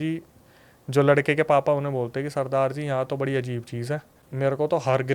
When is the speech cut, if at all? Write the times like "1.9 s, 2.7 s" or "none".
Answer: 4.2 s